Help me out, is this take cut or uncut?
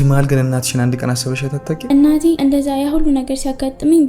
cut